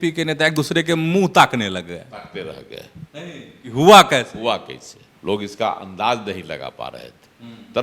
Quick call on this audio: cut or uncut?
uncut